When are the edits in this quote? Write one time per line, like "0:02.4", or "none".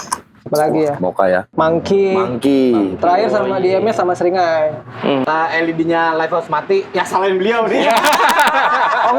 0:01.5
0:05.2